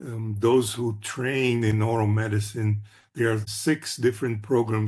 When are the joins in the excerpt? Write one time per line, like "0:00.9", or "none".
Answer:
0:03.5